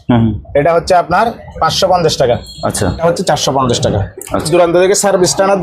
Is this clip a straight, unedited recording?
no; 2 cuts; at 3.0 s, 4.5 s

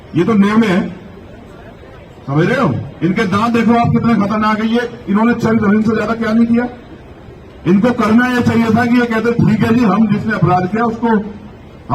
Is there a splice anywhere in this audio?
no; 0 cuts

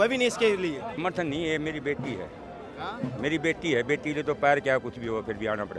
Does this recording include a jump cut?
yes; 1 cut; at 1.0 s

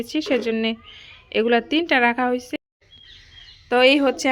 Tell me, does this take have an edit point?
yes; 1 cut; at 2.6 s

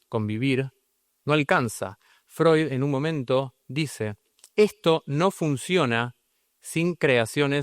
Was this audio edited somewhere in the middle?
no; 0 cuts

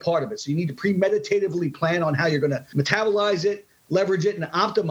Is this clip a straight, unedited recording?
no; 1 cut; at 2.7 s

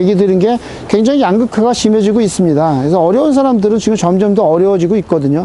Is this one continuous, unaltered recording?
yes; 0 cuts

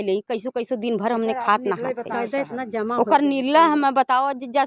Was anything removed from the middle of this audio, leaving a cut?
no; 0 cuts

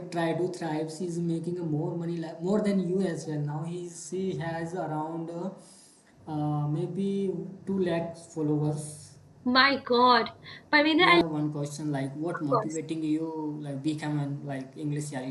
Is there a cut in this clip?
yes; 1 cut; at 11.2 s

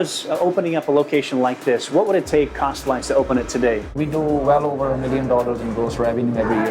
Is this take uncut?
no; 1 cut; at 4.0 s

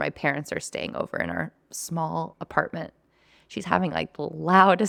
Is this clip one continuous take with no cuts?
yes; 0 cuts

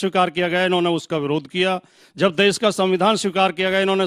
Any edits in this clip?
yes; 1 cut; at 2.0 s

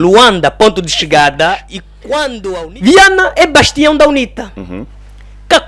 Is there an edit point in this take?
yes; 1 cut; at 2.3 s

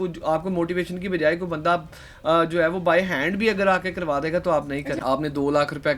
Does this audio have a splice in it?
yes; 1 cut; at 5.0 s

